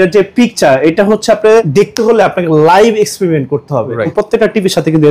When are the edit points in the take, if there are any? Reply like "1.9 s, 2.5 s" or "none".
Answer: 1.7 s, 4.1 s